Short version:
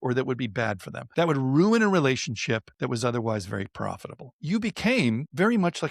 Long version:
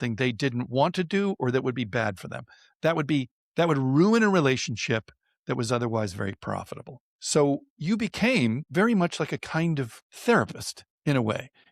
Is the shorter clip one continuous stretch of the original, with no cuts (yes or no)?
no